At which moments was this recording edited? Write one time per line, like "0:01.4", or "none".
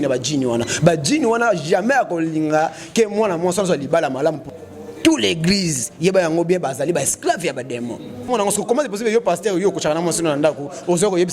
0:04.5
0:08.3